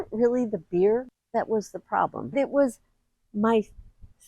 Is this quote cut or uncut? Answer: cut